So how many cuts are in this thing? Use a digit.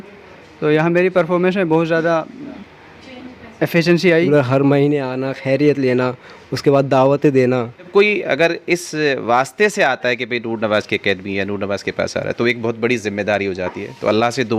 2